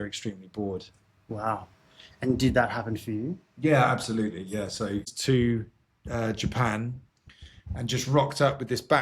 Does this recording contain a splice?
yes; 1 cut; at 5.1 s

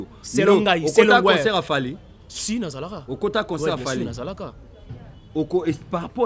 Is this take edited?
no; 0 cuts

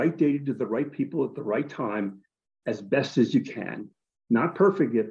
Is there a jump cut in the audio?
no; 0 cuts

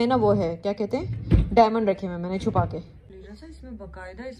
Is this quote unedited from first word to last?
no; 1 cut; at 3.2 s

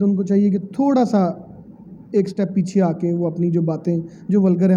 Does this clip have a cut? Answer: no; 0 cuts

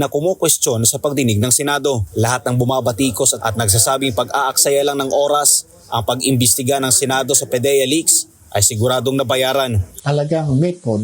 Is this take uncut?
no; 2 cuts; at 2.1 s, 9.9 s

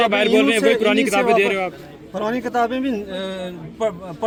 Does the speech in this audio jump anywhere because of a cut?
no; 0 cuts

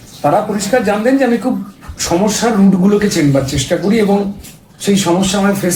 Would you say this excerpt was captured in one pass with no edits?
yes; 0 cuts

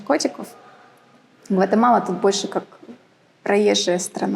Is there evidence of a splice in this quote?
no; 0 cuts

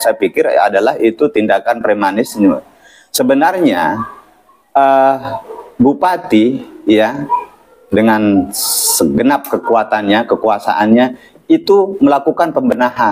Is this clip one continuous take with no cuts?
yes; 0 cuts

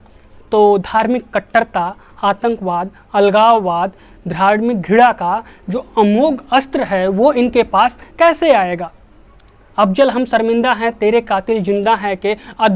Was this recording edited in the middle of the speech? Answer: no; 0 cuts

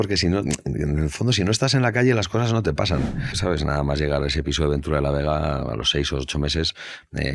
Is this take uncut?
no; 1 cut; at 3.3 s

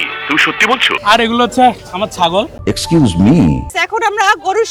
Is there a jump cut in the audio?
yes; 2 cuts; at 0.9 s, 3.7 s

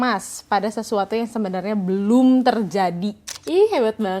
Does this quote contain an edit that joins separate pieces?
yes; 1 cut; at 3.3 s

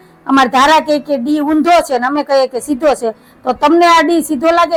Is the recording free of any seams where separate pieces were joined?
yes; 0 cuts

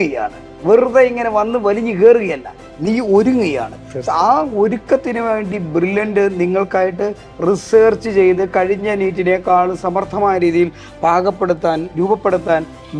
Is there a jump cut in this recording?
no; 0 cuts

